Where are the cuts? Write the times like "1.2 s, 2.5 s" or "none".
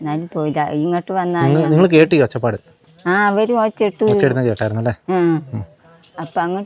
none